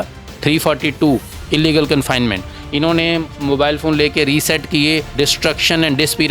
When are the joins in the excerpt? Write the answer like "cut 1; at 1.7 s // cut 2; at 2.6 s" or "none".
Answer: cut 1; at 5.1 s

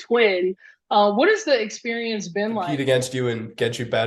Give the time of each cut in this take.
cut 1; at 2.7 s

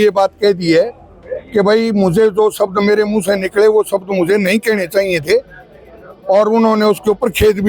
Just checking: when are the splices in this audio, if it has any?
none

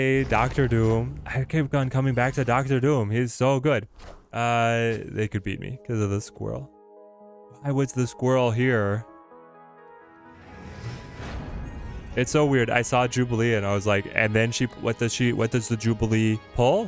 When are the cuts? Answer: none

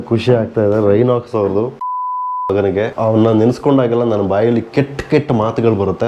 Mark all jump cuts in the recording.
cut 1; at 1.8 s

